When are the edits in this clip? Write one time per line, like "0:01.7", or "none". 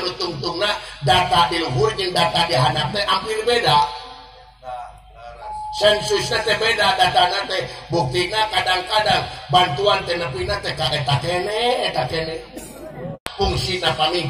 0:13.2